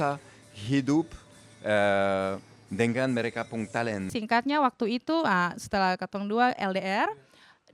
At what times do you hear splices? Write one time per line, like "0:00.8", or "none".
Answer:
0:04.1

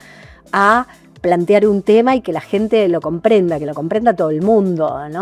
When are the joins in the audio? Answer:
none

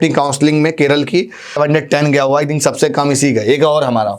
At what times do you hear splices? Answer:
0:01.6

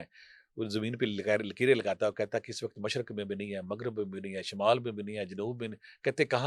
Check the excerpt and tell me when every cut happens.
none

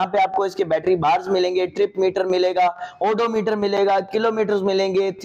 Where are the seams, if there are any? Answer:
none

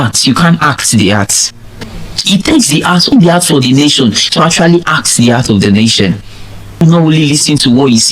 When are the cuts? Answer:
0:03.1
0:06.8

